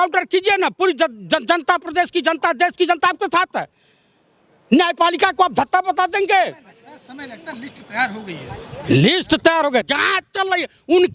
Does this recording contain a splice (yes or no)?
no